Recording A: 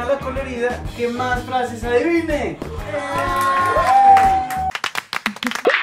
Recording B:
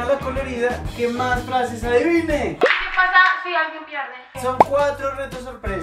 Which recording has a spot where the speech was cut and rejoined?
B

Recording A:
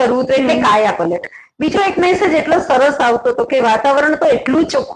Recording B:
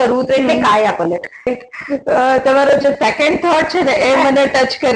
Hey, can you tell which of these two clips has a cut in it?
B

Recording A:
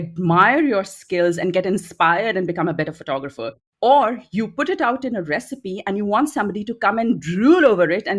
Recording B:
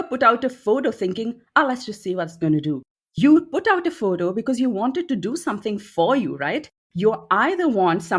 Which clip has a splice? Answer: A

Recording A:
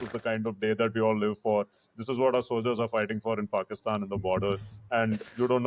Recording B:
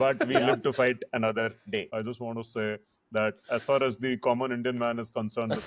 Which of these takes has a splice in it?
B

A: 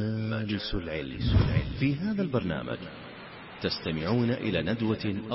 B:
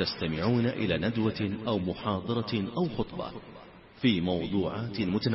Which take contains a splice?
A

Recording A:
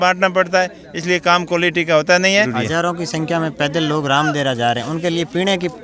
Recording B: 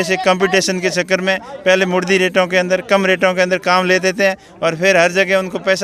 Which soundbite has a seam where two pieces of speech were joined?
A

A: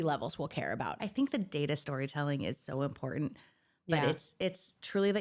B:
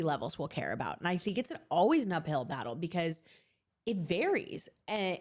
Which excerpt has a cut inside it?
A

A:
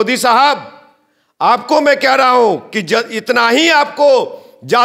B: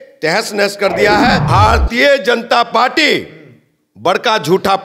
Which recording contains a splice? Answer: B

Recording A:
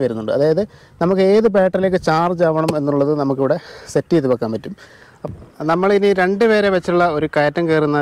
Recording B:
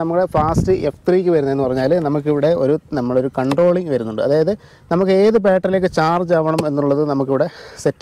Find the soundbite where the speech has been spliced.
A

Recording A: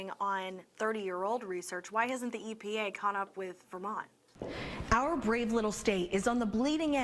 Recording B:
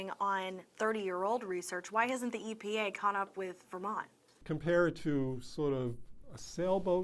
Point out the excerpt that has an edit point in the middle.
A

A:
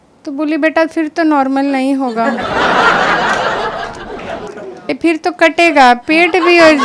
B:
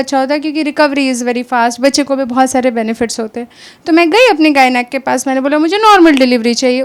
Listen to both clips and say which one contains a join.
A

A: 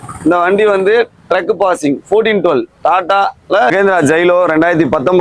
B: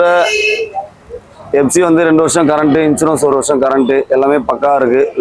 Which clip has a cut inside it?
A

